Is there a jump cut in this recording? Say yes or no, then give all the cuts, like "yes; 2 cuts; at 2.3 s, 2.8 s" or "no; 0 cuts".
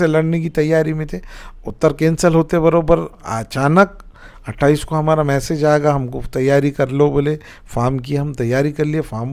no; 0 cuts